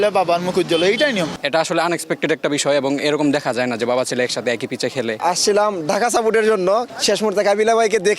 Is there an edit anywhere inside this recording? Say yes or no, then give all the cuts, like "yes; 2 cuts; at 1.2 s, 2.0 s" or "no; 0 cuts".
yes; 3 cuts; at 1.4 s, 5.2 s, 6.9 s